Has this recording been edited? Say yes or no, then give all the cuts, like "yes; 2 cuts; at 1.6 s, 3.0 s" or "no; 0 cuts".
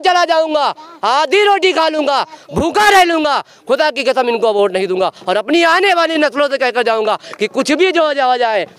no; 0 cuts